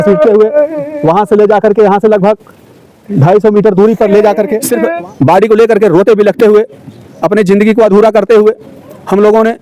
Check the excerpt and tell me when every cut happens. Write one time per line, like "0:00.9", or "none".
0:04.6